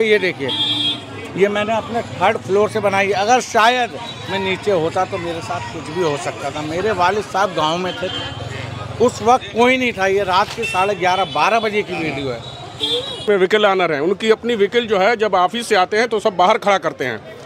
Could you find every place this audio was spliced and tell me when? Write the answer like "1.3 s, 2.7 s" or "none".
13.2 s